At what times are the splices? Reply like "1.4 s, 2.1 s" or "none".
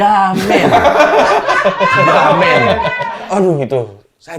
3.2 s